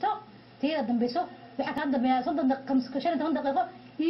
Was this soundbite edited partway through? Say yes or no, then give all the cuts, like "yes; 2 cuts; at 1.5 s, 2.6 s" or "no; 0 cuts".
no; 0 cuts